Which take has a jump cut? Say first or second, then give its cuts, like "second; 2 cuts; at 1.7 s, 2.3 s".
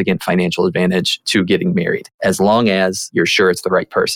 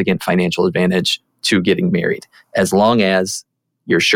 first; 3 cuts; at 1.2 s, 2.1 s, 3.0 s